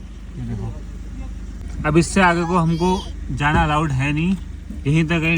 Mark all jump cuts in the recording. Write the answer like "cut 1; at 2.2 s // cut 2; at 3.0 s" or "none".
cut 1; at 1.4 s

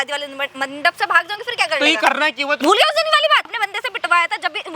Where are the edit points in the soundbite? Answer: cut 1; at 2.6 s // cut 2; at 3.6 s

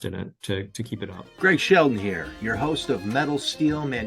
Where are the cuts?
cut 1; at 1.2 s

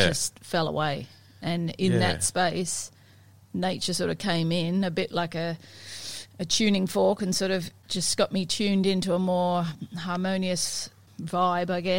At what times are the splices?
cut 1; at 7.8 s // cut 2; at 11.1 s

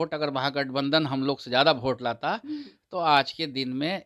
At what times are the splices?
none

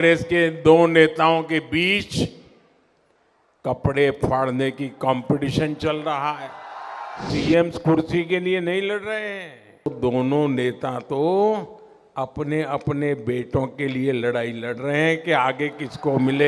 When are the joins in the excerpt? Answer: cut 1; at 7.3 s // cut 2; at 9.9 s

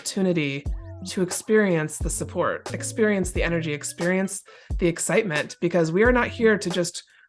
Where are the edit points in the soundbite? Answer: none

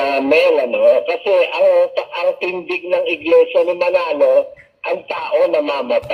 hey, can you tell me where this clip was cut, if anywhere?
none

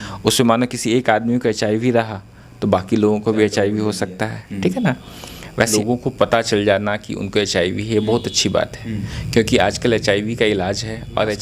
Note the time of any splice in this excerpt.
cut 1; at 5.7 s

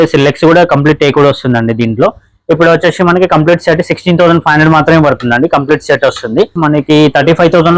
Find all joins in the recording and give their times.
cut 1; at 6.5 s

